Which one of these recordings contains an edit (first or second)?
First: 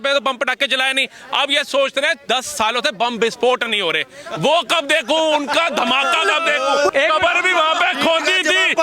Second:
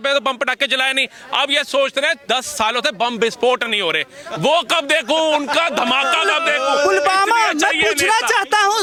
first